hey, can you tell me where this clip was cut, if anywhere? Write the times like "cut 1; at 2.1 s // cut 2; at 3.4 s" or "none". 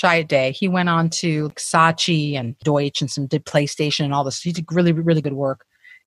cut 1; at 1.5 s // cut 2; at 2.6 s // cut 3; at 5.2 s